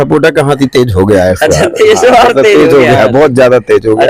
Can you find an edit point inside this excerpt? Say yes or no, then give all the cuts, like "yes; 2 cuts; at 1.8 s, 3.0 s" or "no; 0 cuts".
no; 0 cuts